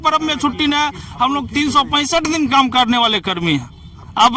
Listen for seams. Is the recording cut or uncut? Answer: uncut